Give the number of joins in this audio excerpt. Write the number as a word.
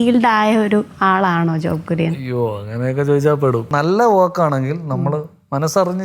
two